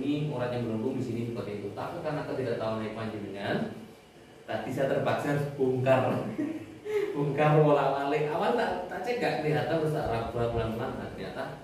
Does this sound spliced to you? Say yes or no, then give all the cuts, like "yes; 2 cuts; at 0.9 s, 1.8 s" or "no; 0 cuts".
no; 0 cuts